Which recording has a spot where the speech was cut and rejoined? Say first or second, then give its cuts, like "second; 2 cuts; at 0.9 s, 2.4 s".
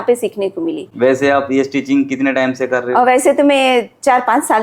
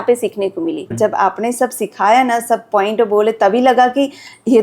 second; 1 cut; at 0.9 s